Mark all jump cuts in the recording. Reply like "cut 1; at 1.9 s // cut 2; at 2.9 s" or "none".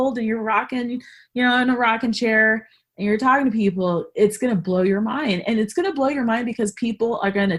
none